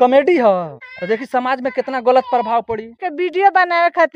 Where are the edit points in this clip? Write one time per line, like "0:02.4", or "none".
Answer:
0:03.0